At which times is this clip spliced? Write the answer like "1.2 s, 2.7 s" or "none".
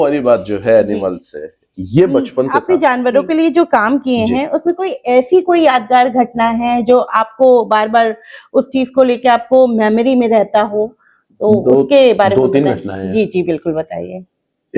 2.6 s